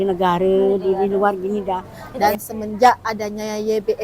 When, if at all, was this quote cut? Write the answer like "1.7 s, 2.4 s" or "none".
2.0 s